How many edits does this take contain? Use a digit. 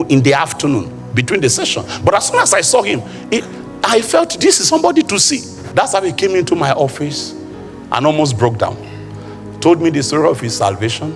1